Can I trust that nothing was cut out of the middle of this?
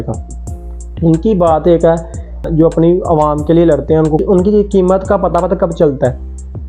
no; 1 cut; at 2.5 s

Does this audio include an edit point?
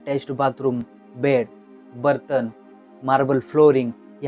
no; 0 cuts

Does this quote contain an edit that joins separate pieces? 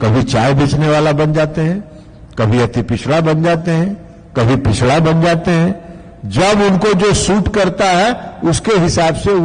no; 0 cuts

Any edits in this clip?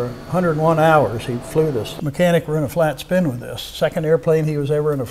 yes; 1 cut; at 2.0 s

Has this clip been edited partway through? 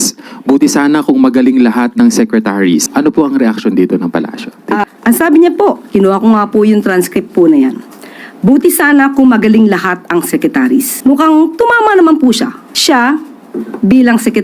yes; 4 cuts; at 2.9 s, 4.8 s, 10.9 s, 12.7 s

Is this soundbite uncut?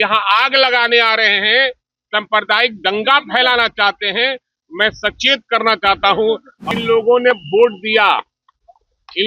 no; 1 cut; at 6.6 s

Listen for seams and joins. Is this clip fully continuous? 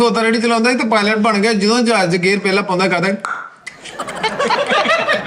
yes; 0 cuts

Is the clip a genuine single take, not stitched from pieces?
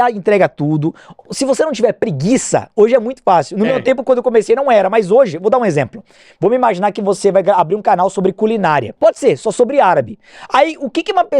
no; 1 cut; at 8.9 s

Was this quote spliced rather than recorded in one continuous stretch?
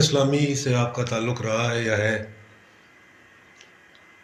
no; 0 cuts

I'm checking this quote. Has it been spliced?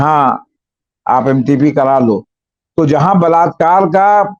no; 0 cuts

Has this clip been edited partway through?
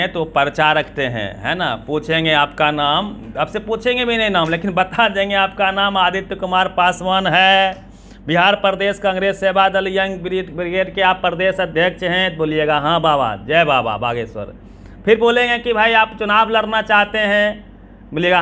no; 0 cuts

